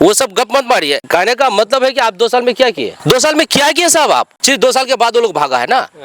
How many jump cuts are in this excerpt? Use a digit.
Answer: 3